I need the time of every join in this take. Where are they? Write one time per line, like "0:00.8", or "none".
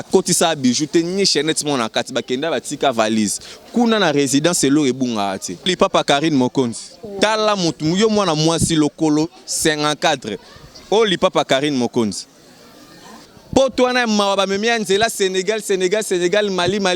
0:05.7
0:13.2